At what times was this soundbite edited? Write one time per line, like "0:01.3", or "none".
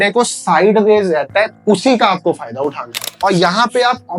0:01.5
0:03.0